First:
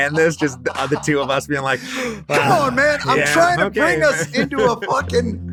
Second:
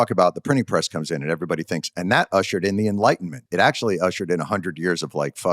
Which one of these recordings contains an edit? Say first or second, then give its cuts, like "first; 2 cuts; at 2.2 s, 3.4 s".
second; 1 cut; at 3.4 s